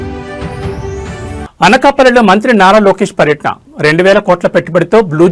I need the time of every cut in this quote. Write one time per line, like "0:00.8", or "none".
0:01.3